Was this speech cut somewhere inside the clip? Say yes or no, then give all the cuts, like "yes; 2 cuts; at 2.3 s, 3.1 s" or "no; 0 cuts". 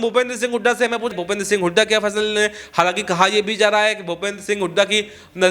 yes; 1 cut; at 1.1 s